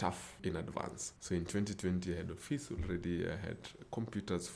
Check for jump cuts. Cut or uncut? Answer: uncut